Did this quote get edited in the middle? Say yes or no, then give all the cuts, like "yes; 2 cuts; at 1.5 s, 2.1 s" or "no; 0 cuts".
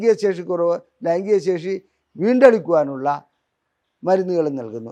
no; 0 cuts